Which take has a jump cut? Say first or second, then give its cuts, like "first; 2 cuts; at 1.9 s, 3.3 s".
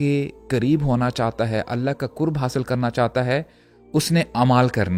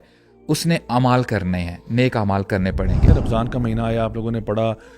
second; 1 cut; at 3.1 s